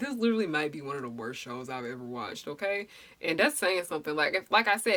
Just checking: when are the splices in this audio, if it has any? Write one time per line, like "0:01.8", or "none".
none